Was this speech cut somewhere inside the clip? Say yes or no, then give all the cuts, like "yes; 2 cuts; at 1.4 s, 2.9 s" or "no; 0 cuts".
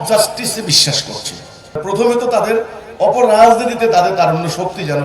yes; 1 cut; at 1.8 s